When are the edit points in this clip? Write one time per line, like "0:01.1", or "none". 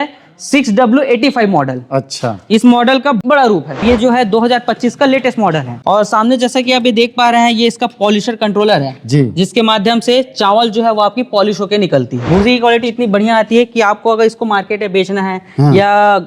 0:03.8
0:05.7
0:12.3